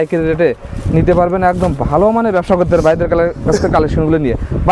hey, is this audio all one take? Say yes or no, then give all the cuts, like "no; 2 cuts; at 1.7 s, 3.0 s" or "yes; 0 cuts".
yes; 0 cuts